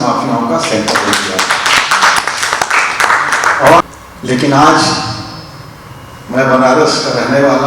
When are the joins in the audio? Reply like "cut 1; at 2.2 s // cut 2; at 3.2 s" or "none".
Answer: cut 1; at 3.8 s